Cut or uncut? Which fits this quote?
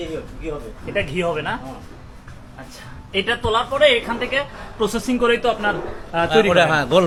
uncut